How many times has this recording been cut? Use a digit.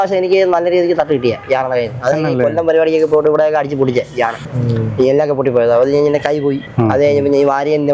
0